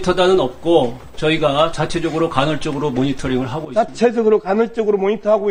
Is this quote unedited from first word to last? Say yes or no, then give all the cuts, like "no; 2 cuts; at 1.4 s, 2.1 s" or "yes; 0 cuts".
yes; 0 cuts